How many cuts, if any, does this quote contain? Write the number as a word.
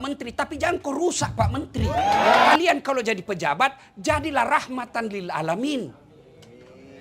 one